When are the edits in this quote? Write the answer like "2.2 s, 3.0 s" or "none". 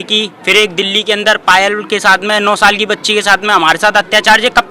none